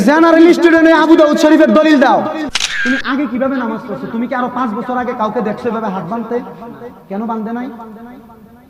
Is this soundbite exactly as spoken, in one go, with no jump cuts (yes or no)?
no